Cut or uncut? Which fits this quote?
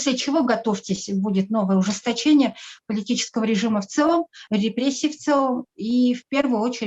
uncut